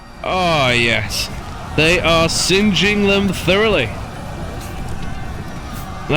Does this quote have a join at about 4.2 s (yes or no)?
no